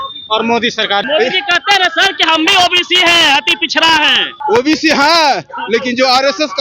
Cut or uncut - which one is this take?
cut